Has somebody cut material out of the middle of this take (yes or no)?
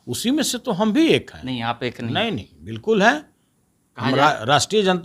no